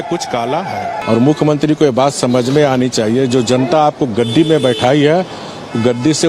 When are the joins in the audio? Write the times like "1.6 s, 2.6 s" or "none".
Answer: 1.0 s